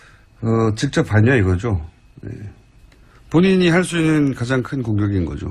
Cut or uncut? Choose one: uncut